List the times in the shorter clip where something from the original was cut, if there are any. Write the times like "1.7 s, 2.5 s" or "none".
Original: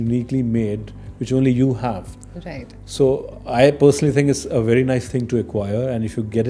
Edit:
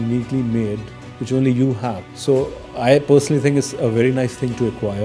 2.1 s